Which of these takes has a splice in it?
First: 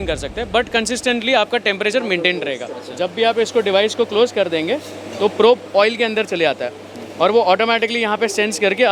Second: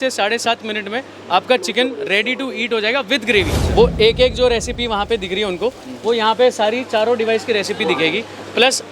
second; 1 cut; at 3.6 s

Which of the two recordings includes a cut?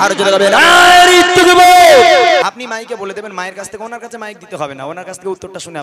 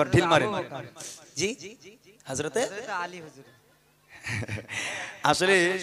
first; 1 cut; at 2.4 s

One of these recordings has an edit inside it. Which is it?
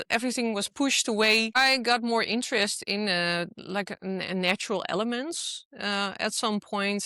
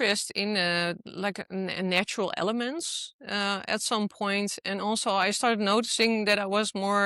first; 1 cut; at 1.6 s

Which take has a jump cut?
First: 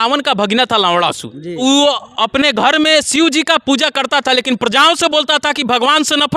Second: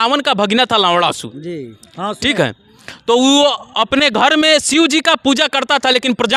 first; 1 cut; at 1.6 s

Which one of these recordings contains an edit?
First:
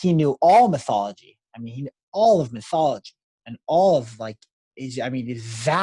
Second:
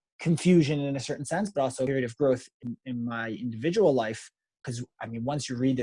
second; 3 cuts; at 1.9 s, 2.5 s, 4.6 s

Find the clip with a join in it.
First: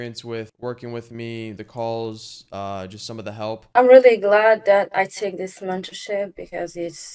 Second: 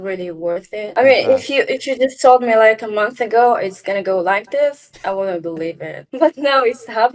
second; 2 cuts; at 0.9 s, 6.0 s

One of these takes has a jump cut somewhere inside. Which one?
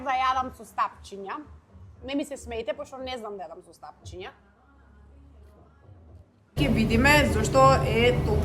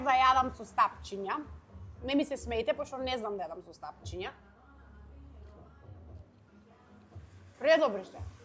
first; 1 cut; at 6.6 s

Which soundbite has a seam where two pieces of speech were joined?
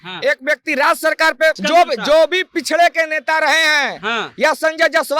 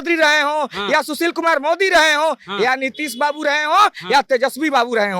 first; 1 cut; at 1.6 s

